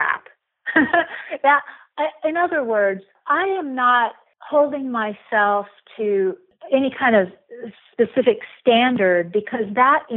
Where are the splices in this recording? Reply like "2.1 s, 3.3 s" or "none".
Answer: none